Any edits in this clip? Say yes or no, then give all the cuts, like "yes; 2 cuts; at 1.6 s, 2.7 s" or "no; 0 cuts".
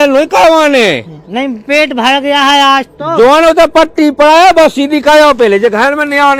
no; 0 cuts